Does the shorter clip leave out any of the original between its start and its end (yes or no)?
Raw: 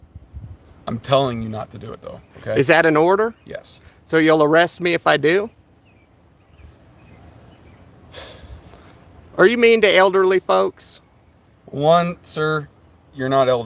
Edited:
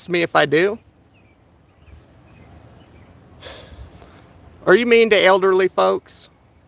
no